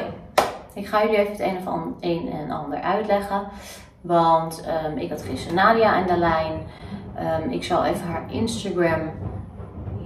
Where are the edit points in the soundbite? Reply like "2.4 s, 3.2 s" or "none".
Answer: none

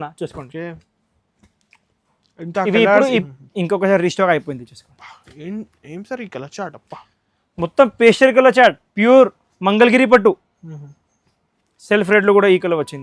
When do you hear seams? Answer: 3.2 s

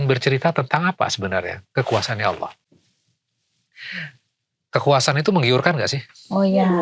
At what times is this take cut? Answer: none

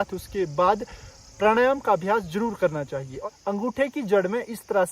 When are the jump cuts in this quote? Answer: 3.2 s

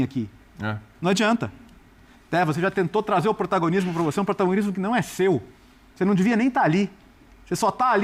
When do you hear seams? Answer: none

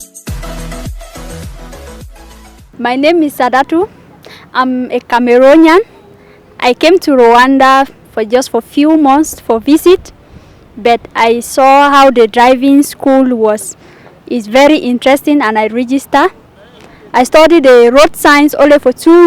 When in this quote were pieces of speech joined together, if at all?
2.6 s

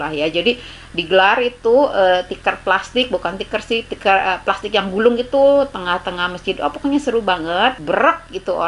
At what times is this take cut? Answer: 7.8 s

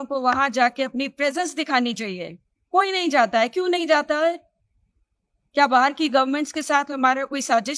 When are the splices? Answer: none

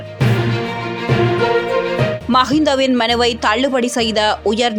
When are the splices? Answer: none

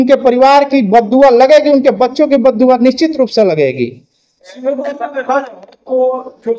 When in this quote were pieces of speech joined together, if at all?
none

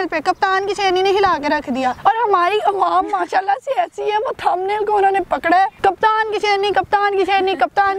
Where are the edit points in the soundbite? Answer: 2.0 s, 5.7 s

